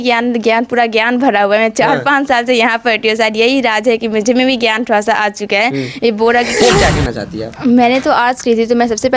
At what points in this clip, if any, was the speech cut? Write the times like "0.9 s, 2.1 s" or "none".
6.5 s